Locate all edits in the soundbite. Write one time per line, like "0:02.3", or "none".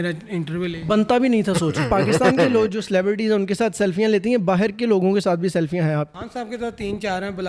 0:01.8
0:06.2